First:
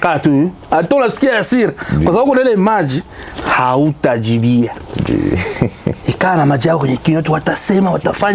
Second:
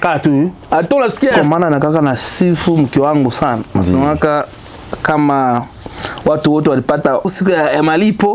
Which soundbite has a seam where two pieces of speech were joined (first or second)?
second